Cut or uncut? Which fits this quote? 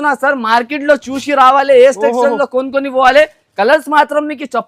uncut